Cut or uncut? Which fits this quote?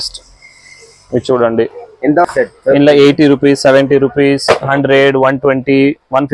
cut